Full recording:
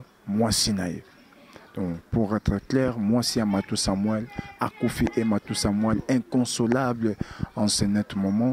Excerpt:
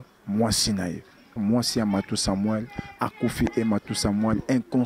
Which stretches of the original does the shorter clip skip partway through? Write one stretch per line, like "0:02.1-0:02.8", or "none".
0:01.3-0:02.9